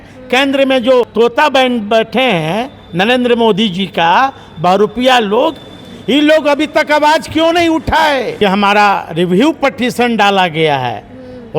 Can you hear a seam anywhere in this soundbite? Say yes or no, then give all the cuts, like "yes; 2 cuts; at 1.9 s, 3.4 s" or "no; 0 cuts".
yes; 2 cuts; at 1.1 s, 8.3 s